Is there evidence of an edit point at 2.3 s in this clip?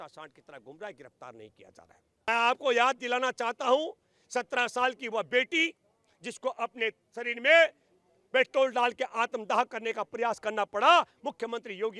yes; 1 cut; at 2.3 s

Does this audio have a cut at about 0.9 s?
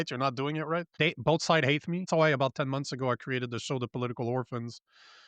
yes; 2 cuts; at 0.9 s, 2.1 s

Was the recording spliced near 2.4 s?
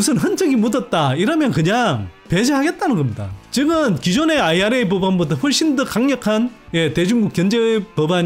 no; 0 cuts

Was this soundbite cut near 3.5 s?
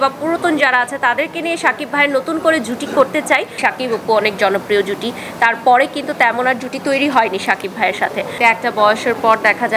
yes; 2 cuts; at 3.5 s, 8.3 s

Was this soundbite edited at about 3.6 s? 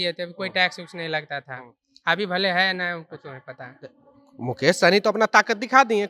no; 0 cuts

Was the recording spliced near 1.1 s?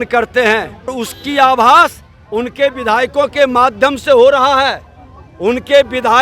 yes; 1 cut; at 1.1 s

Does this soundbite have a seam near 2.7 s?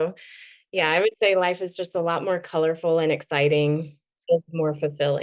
no; 1 cut; at 4.1 s

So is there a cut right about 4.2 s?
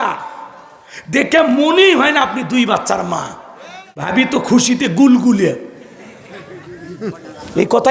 yes; 1 cut; at 4.2 s

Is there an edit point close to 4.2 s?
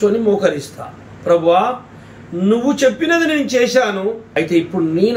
yes; 1 cut; at 4.2 s

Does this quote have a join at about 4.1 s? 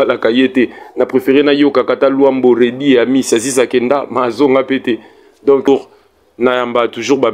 no; 1 cut; at 5.7 s

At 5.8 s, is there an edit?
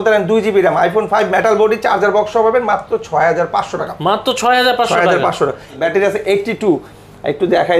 yes; 1 cut; at 5.8 s

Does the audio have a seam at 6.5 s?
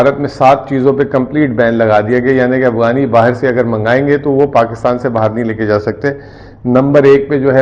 no; 0 cuts

